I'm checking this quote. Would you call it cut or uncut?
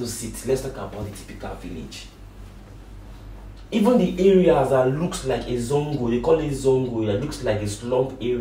uncut